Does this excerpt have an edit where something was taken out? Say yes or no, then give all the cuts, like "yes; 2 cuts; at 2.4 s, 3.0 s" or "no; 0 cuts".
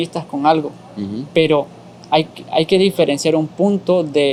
no; 0 cuts